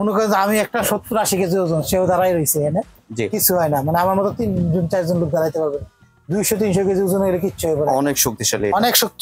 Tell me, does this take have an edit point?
no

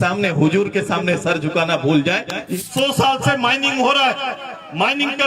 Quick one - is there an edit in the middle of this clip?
yes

